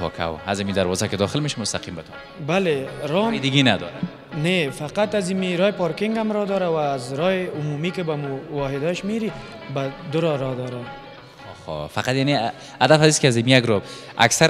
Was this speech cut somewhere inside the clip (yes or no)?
no